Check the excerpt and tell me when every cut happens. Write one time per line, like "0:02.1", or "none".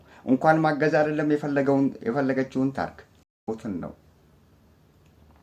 0:03.5

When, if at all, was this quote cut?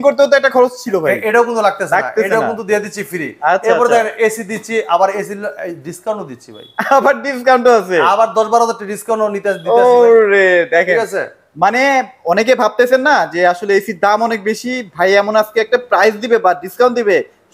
none

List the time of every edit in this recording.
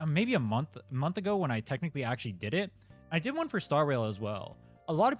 none

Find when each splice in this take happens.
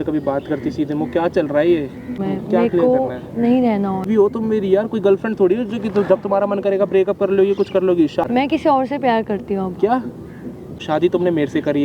0:02.2
0:04.1
0:08.3
0:10.8

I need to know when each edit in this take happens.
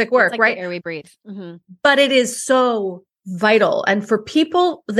none

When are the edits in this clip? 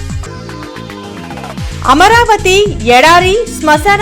0:01.7

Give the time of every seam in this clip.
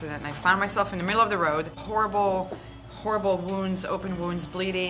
0:01.8

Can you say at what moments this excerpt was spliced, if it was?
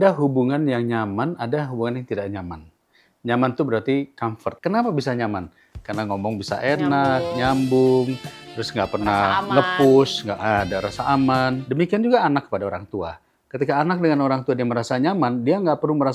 none

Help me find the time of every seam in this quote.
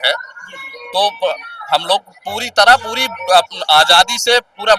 none

